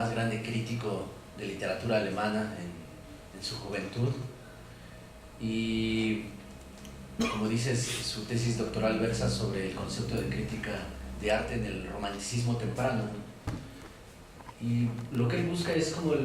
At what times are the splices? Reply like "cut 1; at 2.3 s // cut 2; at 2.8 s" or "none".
cut 1; at 2.3 s